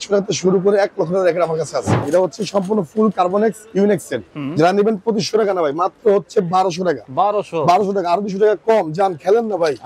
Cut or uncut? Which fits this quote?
cut